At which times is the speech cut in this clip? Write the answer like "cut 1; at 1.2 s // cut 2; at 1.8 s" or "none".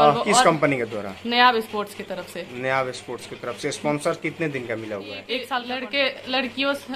cut 1; at 5.7 s